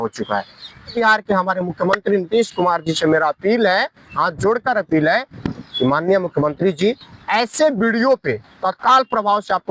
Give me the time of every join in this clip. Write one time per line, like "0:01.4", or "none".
0:00.9